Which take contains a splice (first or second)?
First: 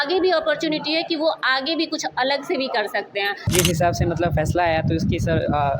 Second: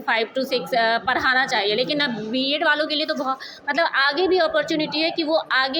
first